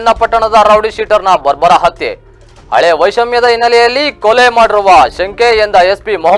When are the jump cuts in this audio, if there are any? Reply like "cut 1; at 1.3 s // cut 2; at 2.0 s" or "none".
none

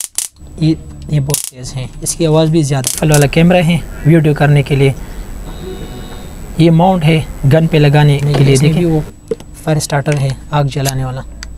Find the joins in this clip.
cut 1; at 3.0 s // cut 2; at 8.7 s

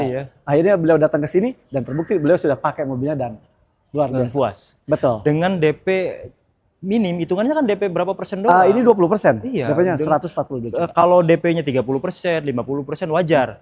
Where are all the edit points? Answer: none

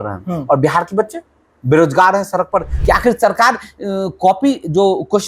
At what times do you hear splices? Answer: cut 1; at 2.7 s

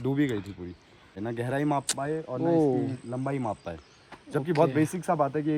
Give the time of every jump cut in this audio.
cut 1; at 1.2 s

